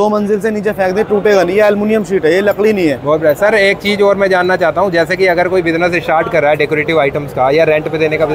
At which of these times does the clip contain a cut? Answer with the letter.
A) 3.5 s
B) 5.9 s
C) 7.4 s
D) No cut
D